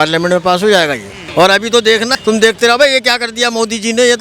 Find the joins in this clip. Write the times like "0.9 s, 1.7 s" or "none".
1.2 s, 2.1 s